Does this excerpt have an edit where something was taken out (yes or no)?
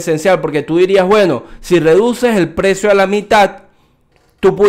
no